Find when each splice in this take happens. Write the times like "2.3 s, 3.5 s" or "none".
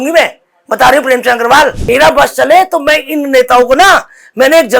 1.8 s